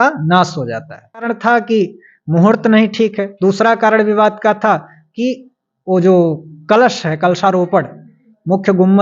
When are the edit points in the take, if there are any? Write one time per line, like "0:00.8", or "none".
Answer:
0:01.3